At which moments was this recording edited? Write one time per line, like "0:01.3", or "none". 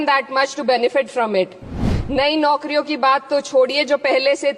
0:01.9